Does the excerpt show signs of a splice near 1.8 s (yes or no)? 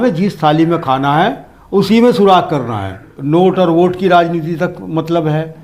no